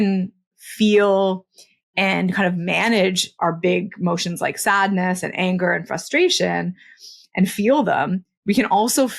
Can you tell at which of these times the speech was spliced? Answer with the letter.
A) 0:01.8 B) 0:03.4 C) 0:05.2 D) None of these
B